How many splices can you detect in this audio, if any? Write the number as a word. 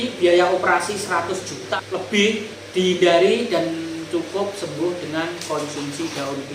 two